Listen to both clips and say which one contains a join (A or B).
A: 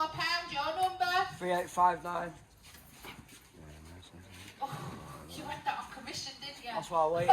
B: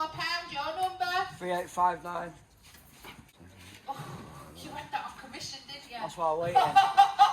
B